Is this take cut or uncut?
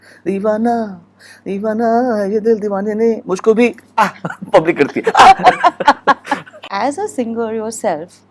cut